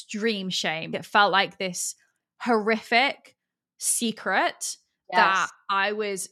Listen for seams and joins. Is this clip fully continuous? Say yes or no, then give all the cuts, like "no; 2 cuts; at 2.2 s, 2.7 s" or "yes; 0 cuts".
no; 2 cuts; at 0.9 s, 4.9 s